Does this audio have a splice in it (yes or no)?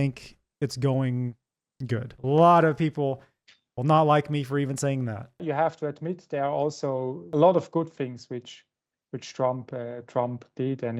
yes